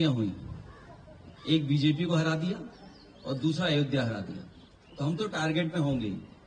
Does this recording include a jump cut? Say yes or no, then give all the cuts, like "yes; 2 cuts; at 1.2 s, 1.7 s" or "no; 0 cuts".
no; 0 cuts